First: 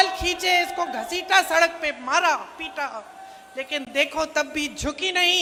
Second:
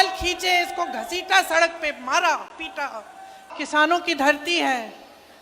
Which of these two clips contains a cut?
second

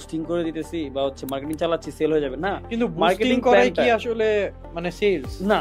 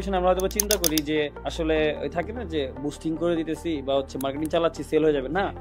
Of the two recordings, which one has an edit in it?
second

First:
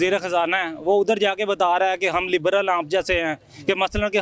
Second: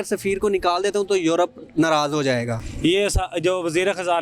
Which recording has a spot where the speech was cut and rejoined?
second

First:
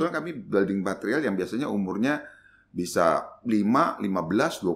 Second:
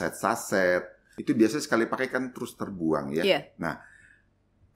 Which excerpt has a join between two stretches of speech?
second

